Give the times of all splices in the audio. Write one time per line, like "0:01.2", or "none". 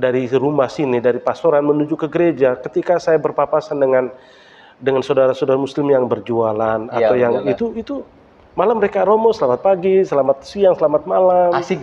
none